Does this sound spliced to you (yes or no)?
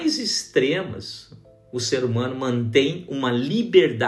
no